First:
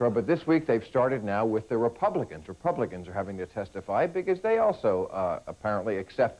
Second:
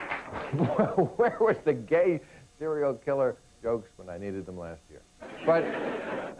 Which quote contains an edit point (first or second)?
second